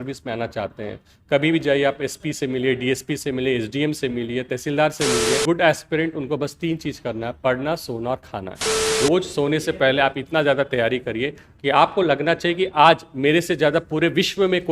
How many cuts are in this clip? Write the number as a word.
two